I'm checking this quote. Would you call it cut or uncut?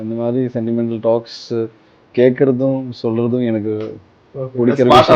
uncut